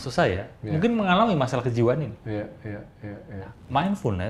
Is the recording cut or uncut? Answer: uncut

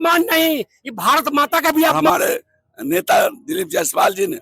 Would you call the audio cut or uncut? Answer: cut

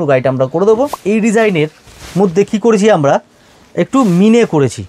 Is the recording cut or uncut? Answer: cut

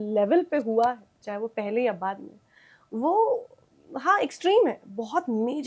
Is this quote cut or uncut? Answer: uncut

